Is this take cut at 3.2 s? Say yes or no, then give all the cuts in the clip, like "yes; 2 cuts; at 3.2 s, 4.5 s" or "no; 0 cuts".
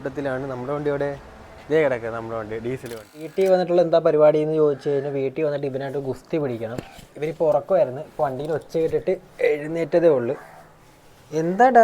yes; 1 cut; at 3.2 s